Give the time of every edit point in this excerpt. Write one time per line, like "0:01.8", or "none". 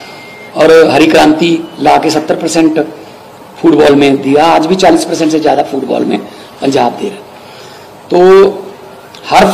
none